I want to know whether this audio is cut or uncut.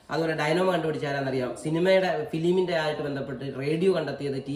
uncut